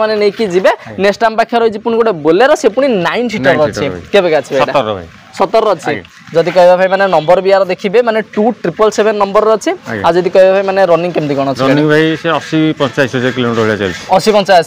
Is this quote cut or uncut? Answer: uncut